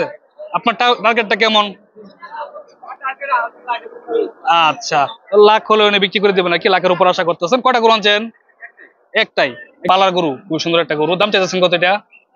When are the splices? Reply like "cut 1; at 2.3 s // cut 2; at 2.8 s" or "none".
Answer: cut 1; at 9.9 s